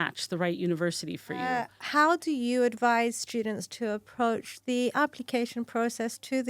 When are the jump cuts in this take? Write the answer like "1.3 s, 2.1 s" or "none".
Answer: 1.5 s